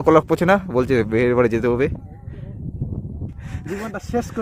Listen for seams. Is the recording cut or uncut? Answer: cut